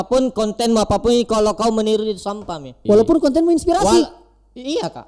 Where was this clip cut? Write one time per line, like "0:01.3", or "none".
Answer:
0:02.7